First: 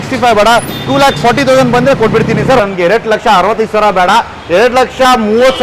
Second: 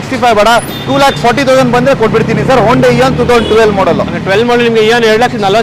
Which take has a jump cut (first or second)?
first